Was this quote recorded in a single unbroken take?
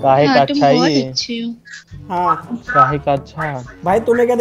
yes; 0 cuts

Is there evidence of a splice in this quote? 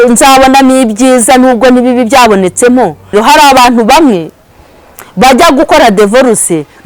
yes; 1 cut; at 3.0 s

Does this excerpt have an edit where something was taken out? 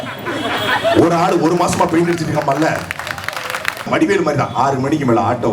yes; 1 cut; at 3.9 s

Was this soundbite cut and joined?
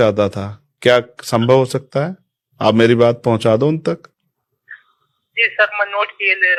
no; 0 cuts

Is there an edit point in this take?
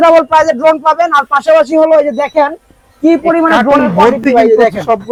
no; 0 cuts

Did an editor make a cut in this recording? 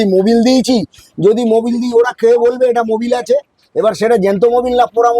no; 0 cuts

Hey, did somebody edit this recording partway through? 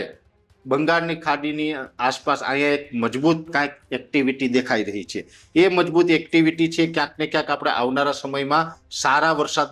no; 0 cuts

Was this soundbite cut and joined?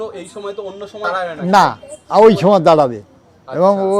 yes; 1 cut; at 1.1 s

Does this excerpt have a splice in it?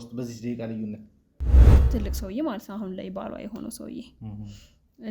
yes; 1 cut; at 1.7 s

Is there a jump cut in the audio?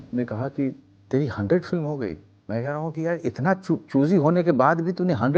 yes; 1 cut; at 2.4 s

